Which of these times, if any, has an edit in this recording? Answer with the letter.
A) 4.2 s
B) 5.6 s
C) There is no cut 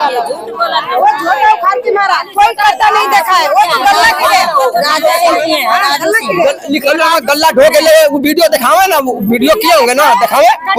C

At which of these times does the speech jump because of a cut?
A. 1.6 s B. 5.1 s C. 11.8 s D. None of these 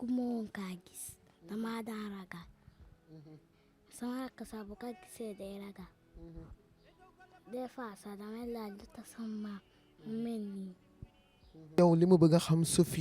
C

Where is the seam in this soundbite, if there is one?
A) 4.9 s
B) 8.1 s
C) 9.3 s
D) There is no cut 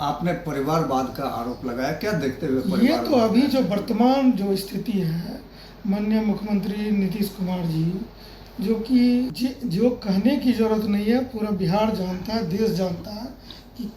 C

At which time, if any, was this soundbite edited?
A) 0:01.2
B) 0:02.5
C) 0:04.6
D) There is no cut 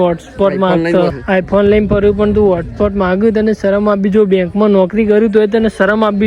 A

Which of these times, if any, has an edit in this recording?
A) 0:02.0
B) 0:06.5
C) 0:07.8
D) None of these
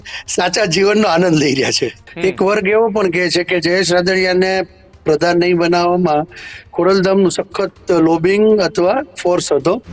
A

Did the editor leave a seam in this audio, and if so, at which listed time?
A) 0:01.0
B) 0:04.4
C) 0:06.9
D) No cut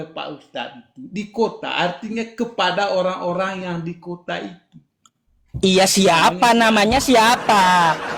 D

